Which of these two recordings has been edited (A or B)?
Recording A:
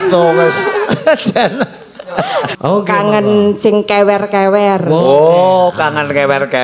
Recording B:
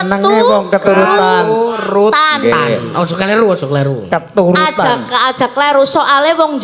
A